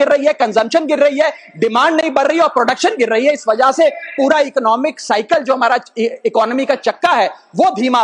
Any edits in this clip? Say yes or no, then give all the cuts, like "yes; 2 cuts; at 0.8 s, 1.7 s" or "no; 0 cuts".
no; 0 cuts